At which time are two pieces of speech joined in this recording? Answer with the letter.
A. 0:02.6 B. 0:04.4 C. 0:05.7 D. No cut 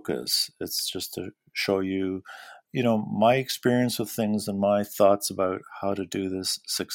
A